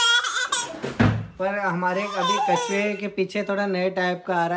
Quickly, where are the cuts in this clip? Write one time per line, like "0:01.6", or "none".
none

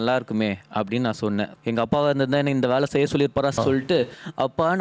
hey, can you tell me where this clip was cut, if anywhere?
0:01.6
0:03.6

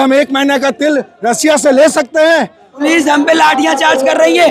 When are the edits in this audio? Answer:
0:02.8

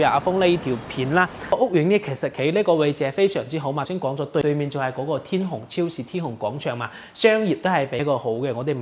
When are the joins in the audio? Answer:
0:01.5
0:04.3
0:08.0

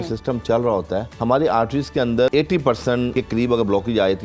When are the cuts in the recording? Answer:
0:01.1
0:02.3
0:03.1

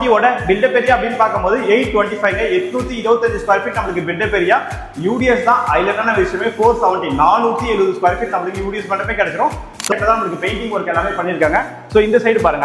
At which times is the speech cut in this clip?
0:09.9

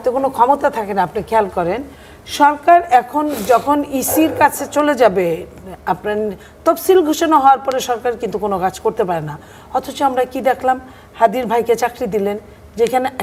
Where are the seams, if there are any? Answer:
none

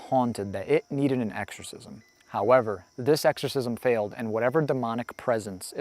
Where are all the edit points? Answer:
none

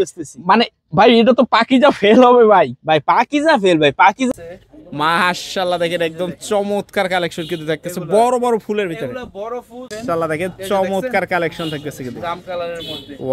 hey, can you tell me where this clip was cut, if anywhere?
0:04.3
0:09.9

